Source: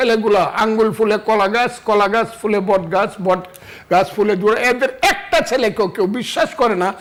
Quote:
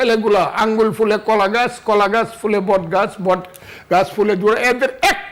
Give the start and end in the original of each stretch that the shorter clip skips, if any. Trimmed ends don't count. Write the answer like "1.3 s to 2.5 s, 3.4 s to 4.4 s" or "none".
none